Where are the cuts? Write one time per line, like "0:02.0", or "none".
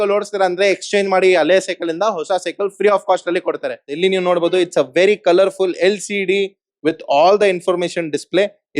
0:03.8